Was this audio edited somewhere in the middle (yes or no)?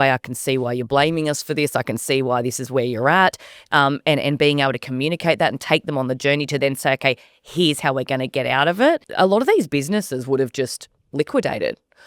yes